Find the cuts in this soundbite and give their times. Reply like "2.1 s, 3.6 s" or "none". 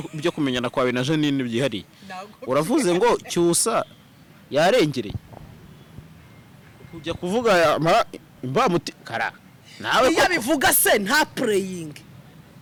none